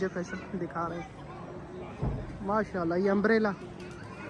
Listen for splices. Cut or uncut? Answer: uncut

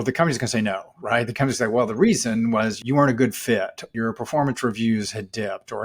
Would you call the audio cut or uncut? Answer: cut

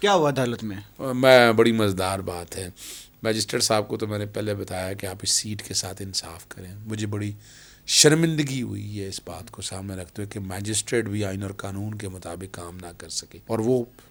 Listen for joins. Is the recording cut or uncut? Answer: uncut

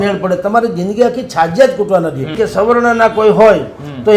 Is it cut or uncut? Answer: cut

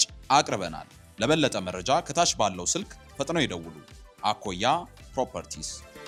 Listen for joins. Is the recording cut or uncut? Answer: uncut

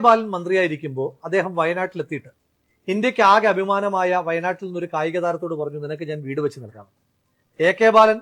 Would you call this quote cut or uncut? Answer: uncut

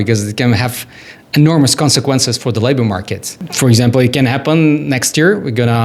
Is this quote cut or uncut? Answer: uncut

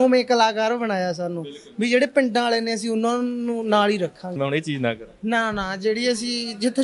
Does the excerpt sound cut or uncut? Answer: cut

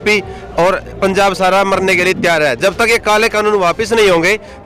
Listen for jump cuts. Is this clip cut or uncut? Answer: uncut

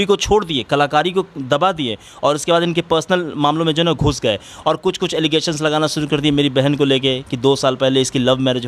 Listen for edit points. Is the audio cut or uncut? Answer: uncut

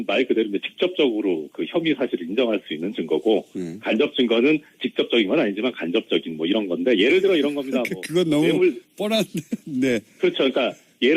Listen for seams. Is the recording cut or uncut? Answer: uncut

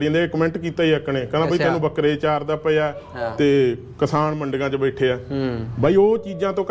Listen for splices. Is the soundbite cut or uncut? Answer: uncut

